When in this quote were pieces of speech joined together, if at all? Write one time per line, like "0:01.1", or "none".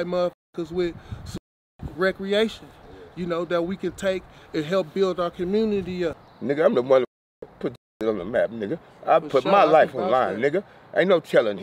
0:06.3